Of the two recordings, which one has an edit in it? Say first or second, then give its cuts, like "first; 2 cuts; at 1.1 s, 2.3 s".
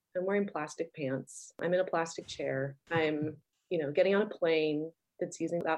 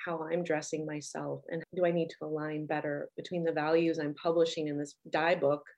first; 2 cuts; at 2.8 s, 3.5 s